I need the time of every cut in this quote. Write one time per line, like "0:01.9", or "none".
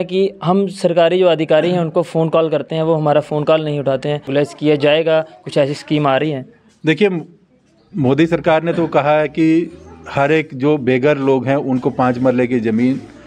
0:04.3